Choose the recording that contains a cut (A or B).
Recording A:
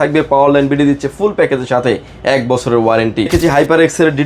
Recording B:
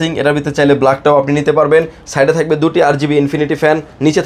A